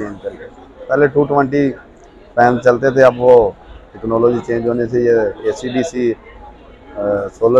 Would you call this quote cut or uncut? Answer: uncut